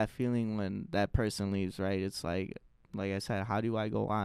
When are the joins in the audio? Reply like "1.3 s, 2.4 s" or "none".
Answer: none